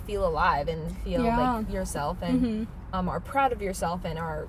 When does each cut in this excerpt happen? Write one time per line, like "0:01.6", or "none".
none